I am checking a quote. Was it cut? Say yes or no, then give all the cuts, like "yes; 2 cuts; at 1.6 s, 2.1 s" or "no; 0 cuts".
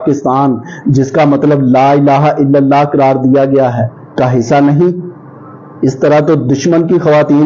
no; 0 cuts